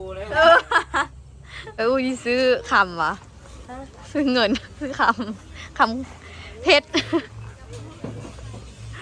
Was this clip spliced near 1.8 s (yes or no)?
yes